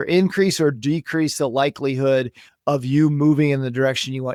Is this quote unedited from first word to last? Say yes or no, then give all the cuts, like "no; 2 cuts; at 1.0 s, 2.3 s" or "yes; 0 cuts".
yes; 0 cuts